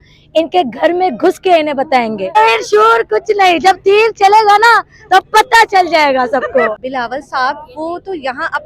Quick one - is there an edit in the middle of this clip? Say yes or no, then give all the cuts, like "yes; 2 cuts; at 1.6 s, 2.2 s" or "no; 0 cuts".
yes; 2 cuts; at 2.4 s, 6.8 s